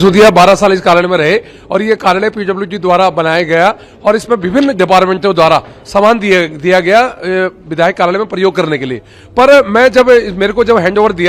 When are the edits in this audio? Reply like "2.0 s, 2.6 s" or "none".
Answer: none